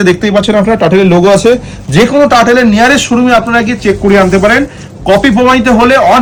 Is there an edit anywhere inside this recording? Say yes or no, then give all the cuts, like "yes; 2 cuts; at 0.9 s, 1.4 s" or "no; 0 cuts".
no; 0 cuts